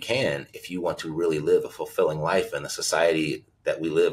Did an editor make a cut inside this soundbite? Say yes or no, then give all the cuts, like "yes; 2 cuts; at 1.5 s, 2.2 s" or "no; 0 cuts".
no; 0 cuts